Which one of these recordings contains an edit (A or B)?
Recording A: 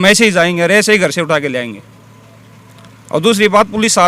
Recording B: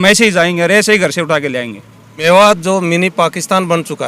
B